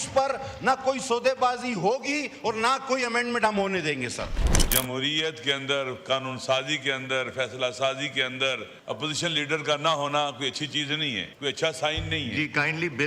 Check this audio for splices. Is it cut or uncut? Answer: cut